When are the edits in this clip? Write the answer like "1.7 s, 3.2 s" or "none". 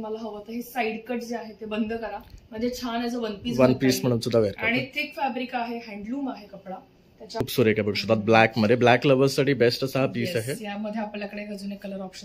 7.4 s

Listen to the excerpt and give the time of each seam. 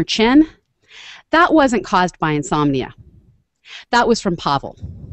none

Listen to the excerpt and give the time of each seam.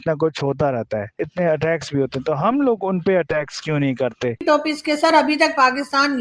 4.4 s

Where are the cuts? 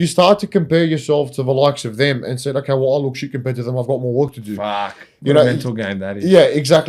none

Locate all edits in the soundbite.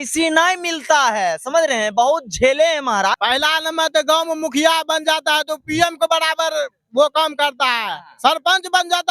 3.1 s

